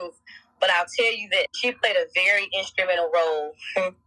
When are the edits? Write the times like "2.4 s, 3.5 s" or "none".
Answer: 1.5 s